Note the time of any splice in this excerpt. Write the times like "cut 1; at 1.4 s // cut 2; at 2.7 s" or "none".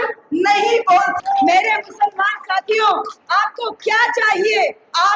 cut 1; at 1.1 s